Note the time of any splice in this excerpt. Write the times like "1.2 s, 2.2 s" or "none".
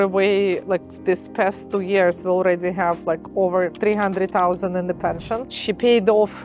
5.5 s